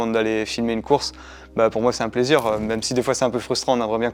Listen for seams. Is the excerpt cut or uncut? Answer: uncut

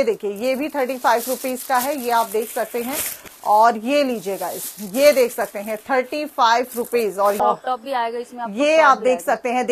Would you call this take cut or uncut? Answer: cut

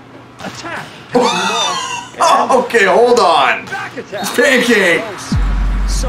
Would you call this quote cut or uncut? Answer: uncut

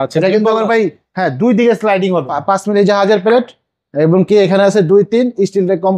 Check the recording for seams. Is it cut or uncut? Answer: cut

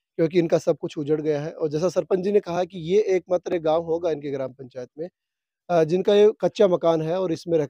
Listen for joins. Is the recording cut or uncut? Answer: uncut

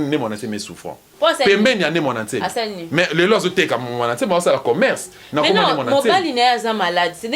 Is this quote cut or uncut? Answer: cut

